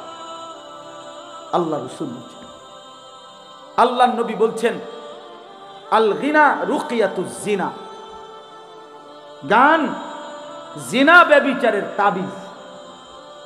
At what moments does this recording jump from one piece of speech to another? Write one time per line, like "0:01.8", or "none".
0:08.1
0:09.4